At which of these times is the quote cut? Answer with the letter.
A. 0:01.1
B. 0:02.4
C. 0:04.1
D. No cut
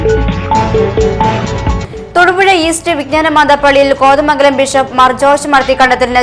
A